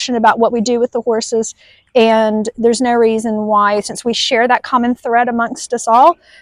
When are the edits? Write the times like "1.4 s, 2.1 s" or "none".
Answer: none